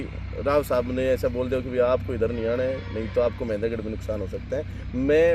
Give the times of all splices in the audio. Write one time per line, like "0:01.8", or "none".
none